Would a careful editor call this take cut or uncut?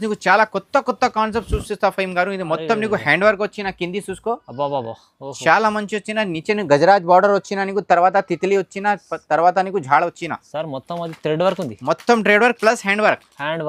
uncut